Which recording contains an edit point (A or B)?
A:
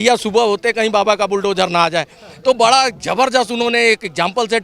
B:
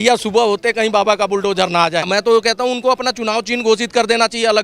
B